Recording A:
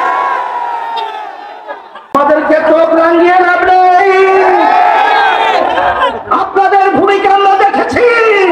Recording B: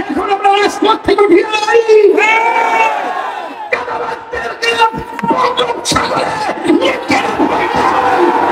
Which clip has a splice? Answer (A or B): A